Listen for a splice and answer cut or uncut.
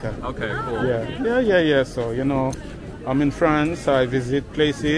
uncut